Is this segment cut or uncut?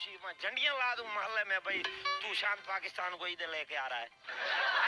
uncut